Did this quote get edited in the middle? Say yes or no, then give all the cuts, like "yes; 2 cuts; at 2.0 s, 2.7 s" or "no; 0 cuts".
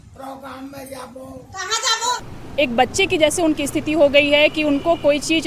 yes; 1 cut; at 2.4 s